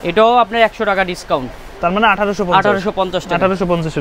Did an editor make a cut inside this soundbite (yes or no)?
no